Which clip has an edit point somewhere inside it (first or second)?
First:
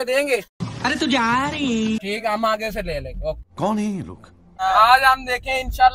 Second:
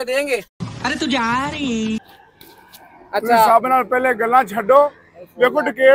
second